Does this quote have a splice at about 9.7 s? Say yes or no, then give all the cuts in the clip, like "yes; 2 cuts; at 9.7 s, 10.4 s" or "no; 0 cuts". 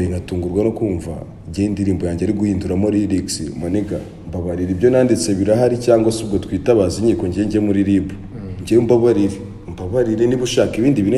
no; 0 cuts